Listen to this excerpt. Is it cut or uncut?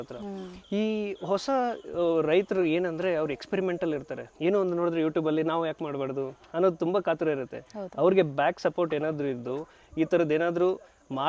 uncut